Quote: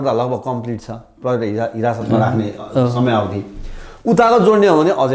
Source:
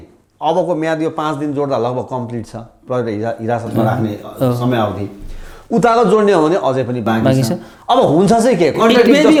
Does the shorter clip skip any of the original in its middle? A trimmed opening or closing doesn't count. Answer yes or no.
no